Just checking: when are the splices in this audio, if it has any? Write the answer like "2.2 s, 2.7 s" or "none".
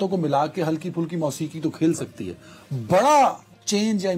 none